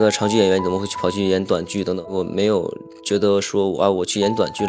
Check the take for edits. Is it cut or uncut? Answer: cut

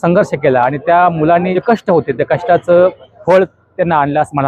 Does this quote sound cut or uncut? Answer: cut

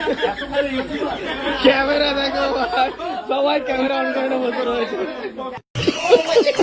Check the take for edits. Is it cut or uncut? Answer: cut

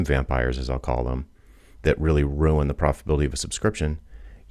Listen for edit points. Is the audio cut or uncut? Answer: uncut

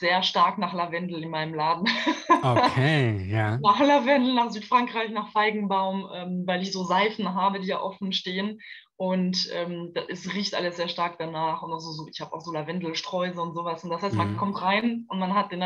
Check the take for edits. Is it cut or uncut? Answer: uncut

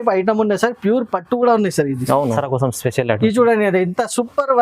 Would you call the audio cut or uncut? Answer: cut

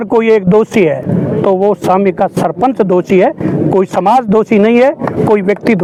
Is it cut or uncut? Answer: uncut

